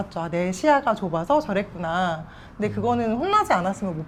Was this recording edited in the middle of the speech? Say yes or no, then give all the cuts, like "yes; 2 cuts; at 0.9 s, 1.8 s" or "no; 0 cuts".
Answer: no; 0 cuts